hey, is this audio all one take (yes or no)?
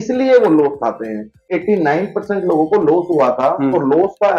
no